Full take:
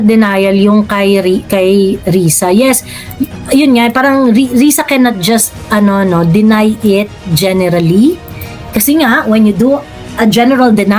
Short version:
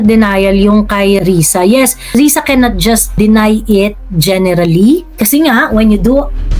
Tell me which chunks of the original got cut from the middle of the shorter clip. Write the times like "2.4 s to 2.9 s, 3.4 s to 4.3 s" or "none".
1.2 s to 2.1 s, 3.0 s to 4.5 s, 5.6 s to 6.3 s, 8.3 s to 8.7 s